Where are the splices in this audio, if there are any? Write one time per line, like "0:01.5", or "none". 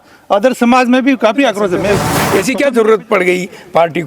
0:02.2